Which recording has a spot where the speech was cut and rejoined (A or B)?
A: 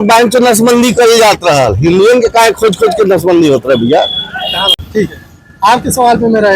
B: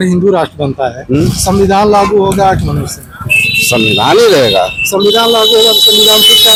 A